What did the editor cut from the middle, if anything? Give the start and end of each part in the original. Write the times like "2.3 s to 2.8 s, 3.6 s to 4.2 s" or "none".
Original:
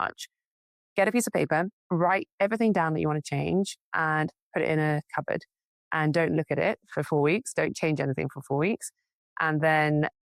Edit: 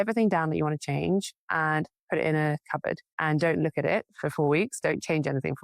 5.5 s to 5.8 s